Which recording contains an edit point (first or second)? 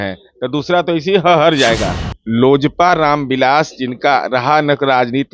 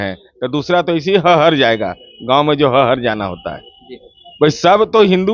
first